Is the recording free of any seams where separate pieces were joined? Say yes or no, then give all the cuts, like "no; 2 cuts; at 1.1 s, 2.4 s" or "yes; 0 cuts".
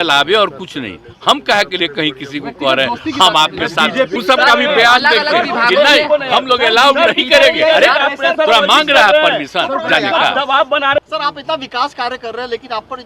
no; 2 cuts; at 4.1 s, 11.0 s